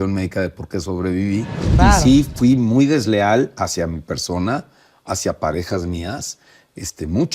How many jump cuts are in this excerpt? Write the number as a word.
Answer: one